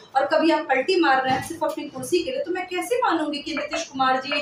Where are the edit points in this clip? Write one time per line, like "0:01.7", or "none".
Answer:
none